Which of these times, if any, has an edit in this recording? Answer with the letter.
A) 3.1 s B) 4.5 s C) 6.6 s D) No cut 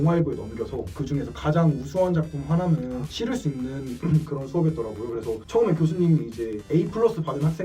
A